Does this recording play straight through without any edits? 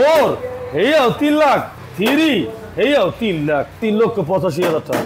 no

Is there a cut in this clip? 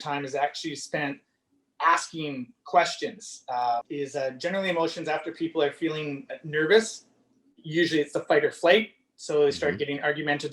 yes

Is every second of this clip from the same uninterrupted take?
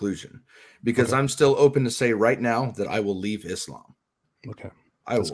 yes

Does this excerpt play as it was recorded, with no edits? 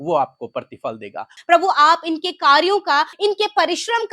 no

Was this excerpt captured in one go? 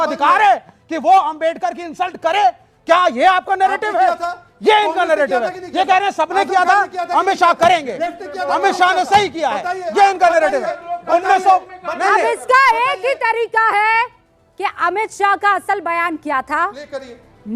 yes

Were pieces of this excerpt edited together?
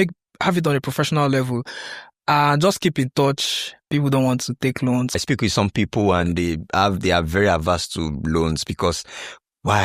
yes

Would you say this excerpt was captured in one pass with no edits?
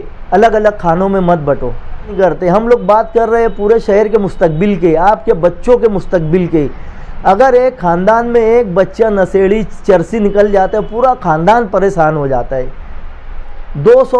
no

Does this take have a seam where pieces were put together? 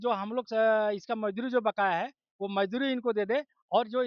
no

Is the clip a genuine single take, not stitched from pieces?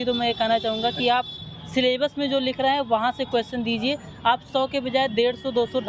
yes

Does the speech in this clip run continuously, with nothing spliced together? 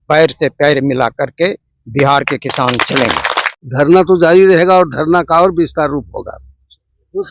no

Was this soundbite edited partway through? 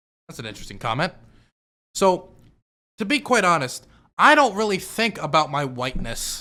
no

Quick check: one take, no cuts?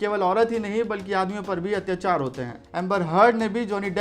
no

